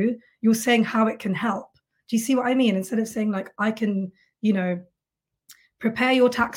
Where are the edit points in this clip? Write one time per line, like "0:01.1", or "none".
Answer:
none

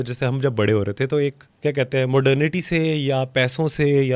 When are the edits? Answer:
0:01.5

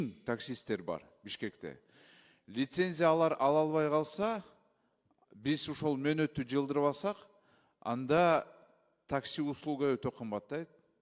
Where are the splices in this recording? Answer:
none

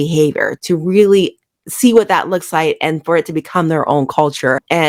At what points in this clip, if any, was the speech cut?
none

